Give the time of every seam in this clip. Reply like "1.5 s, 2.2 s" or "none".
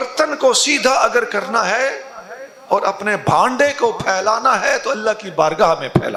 none